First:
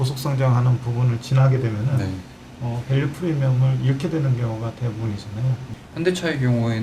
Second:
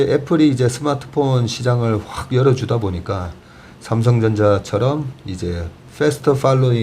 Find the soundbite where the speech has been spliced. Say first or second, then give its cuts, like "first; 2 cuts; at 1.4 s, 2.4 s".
first; 1 cut; at 5.7 s